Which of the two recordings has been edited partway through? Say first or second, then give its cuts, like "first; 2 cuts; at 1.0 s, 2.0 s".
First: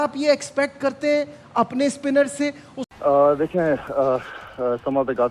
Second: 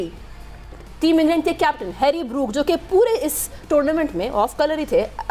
first; 1 cut; at 2.8 s